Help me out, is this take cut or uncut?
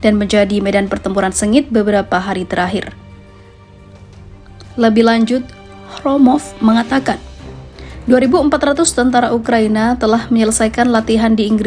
cut